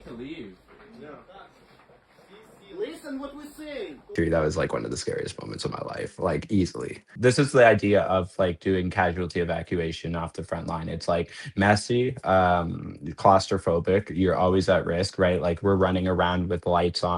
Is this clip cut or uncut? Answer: cut